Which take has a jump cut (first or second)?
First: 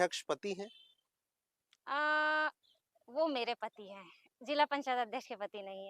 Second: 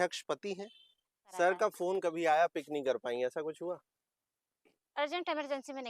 second